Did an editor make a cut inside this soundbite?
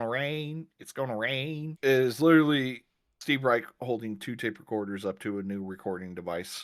yes; 1 cut; at 1.7 s

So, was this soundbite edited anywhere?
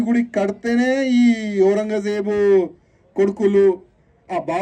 no; 0 cuts

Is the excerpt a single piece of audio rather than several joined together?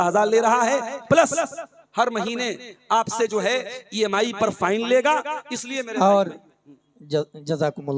yes; 0 cuts

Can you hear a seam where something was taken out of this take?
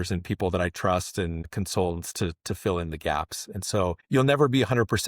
yes; 2 cuts; at 1.5 s, 4.0 s

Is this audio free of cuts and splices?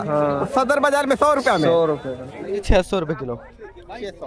no; 1 cut; at 2.7 s

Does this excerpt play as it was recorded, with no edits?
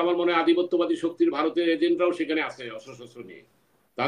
yes; 0 cuts

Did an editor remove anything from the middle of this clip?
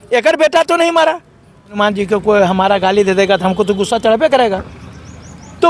yes; 1 cut; at 1.7 s

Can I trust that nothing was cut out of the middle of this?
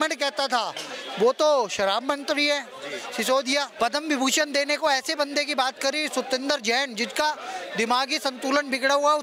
no; 1 cut; at 3.7 s

